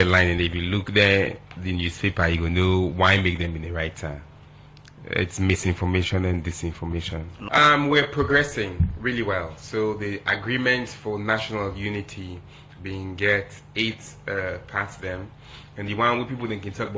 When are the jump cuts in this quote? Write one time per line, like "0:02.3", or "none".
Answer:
0:07.4